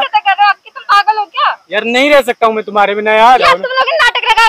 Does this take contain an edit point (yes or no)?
yes